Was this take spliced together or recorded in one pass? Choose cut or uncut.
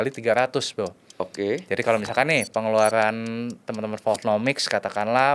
uncut